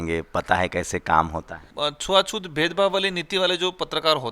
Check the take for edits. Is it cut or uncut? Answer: cut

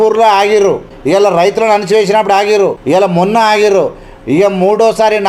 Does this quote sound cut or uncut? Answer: cut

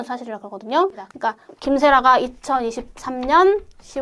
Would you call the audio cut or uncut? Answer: cut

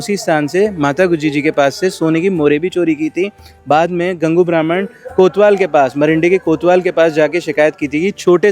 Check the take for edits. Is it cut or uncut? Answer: uncut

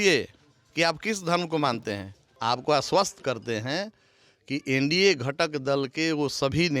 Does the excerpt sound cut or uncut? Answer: cut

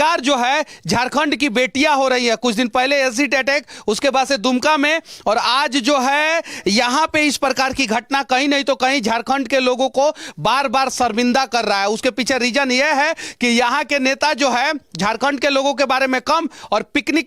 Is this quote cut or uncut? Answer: uncut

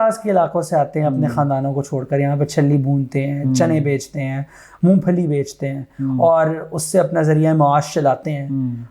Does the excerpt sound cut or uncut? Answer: uncut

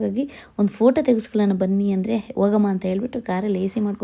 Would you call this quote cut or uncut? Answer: uncut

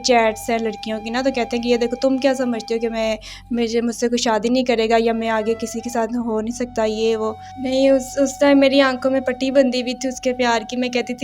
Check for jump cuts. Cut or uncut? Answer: cut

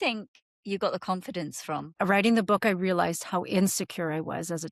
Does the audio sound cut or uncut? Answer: cut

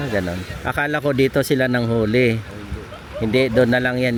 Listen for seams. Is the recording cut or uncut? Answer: uncut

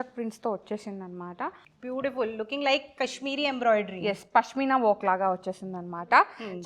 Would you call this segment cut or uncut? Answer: cut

